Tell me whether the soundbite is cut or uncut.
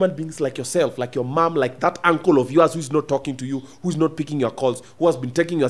uncut